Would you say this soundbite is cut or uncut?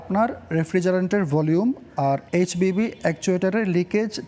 uncut